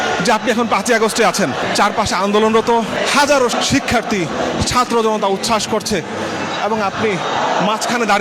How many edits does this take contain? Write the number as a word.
zero